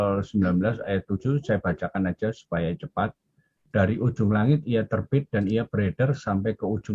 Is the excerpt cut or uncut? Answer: uncut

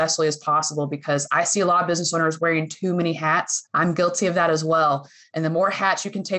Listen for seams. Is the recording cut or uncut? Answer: cut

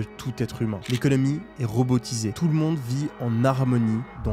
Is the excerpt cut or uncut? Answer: cut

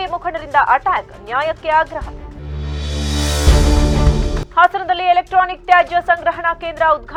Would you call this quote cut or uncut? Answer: uncut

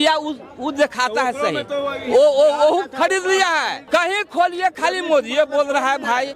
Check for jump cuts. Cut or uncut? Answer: cut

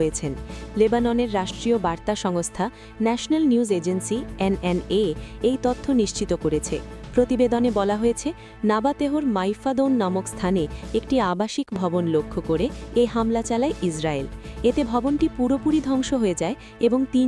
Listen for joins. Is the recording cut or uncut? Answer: uncut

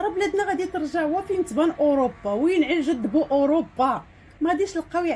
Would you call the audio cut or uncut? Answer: uncut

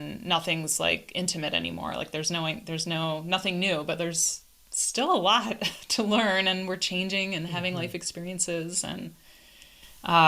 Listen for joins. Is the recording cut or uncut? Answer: uncut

